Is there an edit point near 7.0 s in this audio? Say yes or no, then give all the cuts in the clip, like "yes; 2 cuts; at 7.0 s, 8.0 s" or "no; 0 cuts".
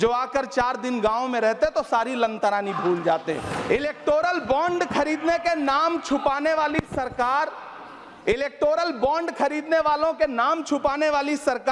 no; 1 cut; at 3.5 s